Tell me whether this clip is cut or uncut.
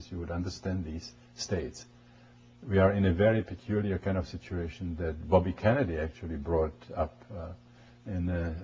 uncut